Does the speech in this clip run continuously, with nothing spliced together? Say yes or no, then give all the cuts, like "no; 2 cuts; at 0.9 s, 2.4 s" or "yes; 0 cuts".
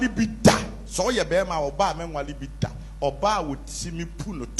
yes; 0 cuts